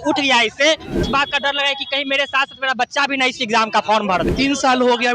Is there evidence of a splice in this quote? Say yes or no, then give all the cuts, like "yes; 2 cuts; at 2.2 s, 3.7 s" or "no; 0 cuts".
yes; 2 cuts; at 1.0 s, 4.3 s